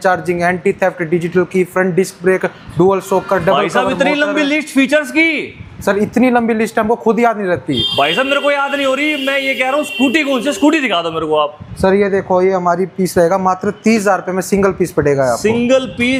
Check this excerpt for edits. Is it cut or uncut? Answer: uncut